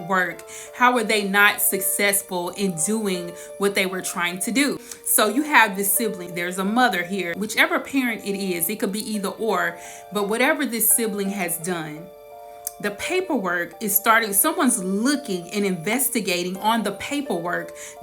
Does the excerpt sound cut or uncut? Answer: cut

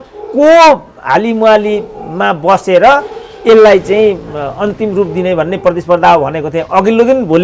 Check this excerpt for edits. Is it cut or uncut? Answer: uncut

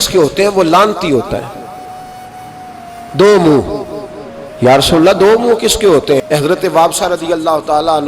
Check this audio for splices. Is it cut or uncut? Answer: cut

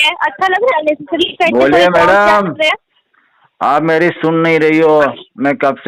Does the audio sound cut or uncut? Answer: uncut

